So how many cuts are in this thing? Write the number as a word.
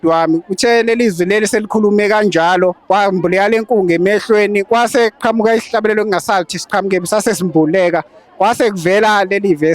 one